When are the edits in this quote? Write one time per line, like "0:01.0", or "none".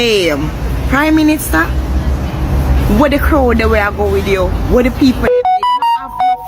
none